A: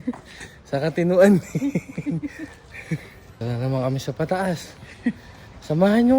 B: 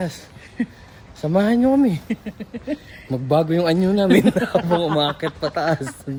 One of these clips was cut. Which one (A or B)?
A